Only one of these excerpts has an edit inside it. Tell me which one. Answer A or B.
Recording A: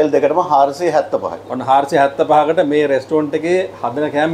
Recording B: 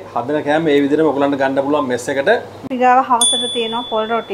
B